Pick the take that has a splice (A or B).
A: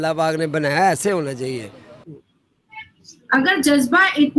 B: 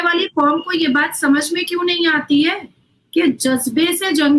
A